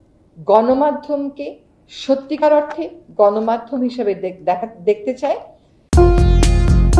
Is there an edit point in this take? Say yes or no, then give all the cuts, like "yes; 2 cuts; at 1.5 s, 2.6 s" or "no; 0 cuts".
no; 0 cuts